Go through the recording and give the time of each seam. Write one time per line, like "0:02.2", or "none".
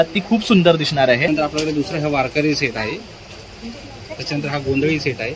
0:01.3